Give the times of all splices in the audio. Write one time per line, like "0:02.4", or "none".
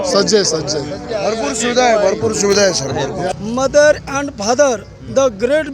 0:03.3